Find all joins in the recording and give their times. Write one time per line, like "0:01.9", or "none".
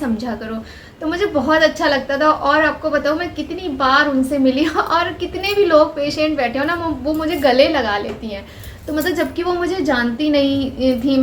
none